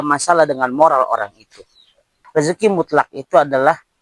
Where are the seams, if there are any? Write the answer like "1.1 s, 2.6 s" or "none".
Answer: 2.2 s